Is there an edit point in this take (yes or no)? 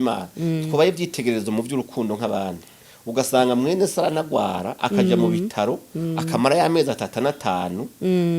no